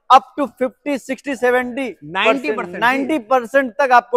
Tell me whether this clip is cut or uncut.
uncut